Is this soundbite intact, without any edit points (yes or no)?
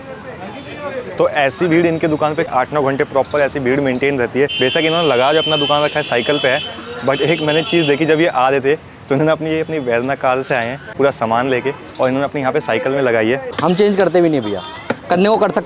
no